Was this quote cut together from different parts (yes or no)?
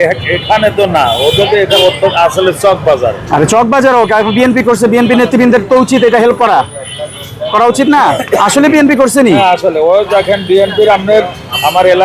no